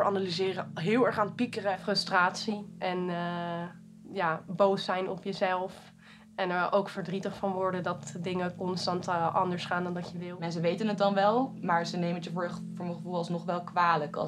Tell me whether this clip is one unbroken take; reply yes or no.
no